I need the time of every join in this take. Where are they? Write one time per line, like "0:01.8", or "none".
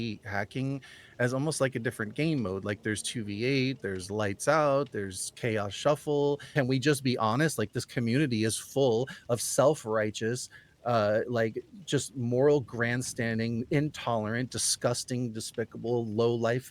0:06.5